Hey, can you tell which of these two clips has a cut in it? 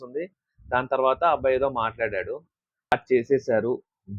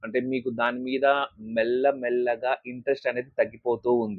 first; 1 cut; at 2.9 s

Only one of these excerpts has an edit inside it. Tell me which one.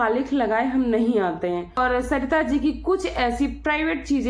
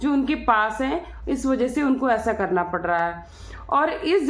first; 1 cut; at 1.8 s

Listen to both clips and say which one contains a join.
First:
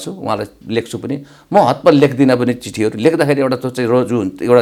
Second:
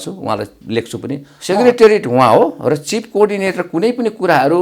second; 1 cut; at 1.3 s

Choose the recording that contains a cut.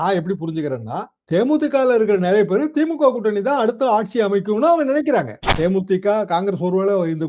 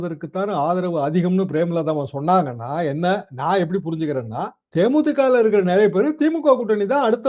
first; 1 cut; at 5.5 s

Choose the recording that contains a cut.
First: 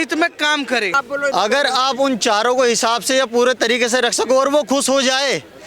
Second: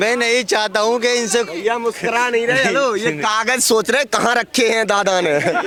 first; 1 cut; at 1.0 s

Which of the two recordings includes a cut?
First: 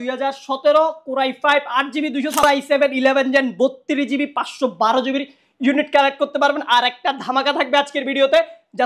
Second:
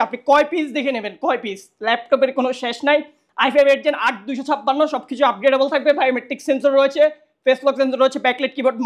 first; 1 cut; at 2.4 s

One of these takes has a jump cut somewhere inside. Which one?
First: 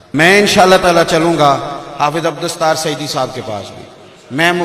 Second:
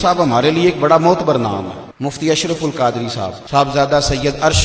second; 2 cuts; at 1.8 s, 3.4 s

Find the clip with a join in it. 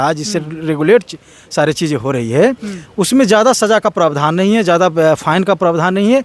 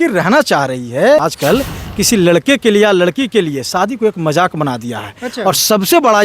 second; 1 cut; at 1.2 s

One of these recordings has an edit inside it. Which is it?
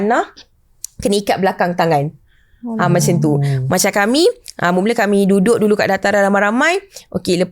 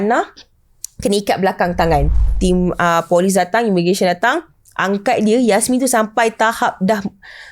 second; 1 cut; at 2.3 s

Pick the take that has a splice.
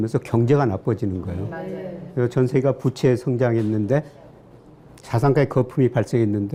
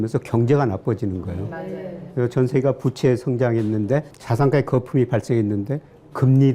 second; 1 cut; at 4.2 s

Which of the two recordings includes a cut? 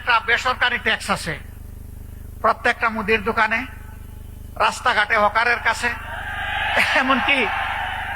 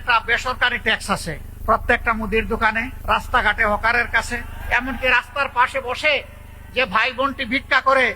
second; 3 cuts; at 1.5 s, 2.9 s, 4.5 s

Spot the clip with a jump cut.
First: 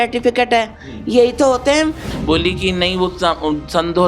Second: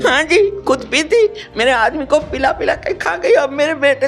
first; 1 cut; at 2.0 s

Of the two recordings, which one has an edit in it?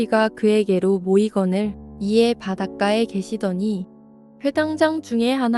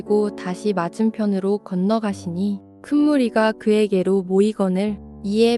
first; 1 cut; at 4.2 s

